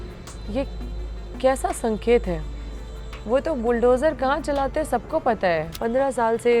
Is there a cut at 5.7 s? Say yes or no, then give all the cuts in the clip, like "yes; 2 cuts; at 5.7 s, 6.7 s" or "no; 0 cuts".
yes; 1 cut; at 5.7 s